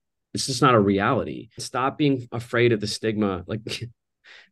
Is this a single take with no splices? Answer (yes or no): no